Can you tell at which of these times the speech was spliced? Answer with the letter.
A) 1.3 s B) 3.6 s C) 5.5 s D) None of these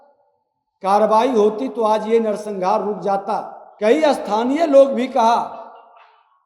B